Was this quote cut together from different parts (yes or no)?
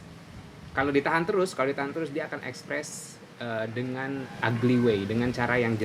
no